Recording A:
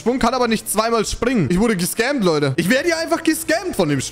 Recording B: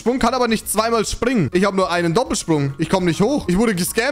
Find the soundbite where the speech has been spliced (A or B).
A